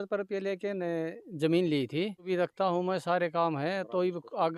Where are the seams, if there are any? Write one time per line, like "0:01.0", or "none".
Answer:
0:02.3